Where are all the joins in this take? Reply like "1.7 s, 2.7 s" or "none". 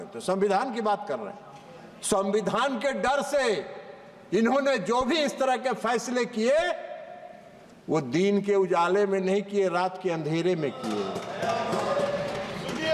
none